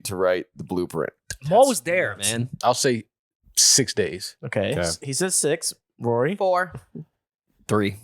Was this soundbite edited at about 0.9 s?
no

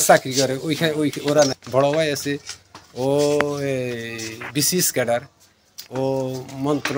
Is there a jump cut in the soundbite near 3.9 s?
no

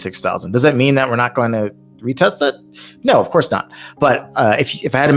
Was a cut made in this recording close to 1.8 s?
no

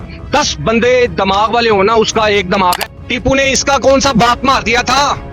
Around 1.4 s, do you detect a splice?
no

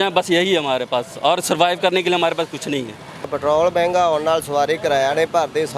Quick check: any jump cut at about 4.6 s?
no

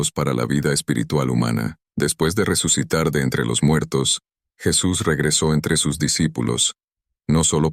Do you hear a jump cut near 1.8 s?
yes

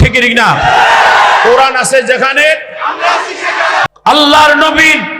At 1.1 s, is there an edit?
no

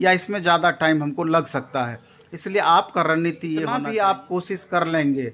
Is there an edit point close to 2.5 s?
no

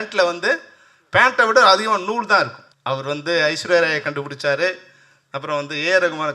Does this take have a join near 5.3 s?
no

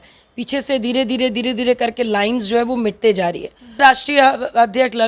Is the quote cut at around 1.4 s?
no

